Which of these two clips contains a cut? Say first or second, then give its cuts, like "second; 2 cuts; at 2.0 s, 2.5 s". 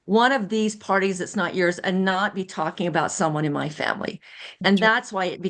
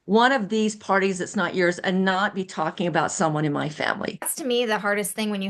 second; 1 cut; at 4.3 s